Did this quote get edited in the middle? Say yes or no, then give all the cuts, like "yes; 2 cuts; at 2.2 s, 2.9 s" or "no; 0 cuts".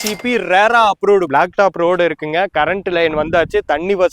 yes; 1 cut; at 1.3 s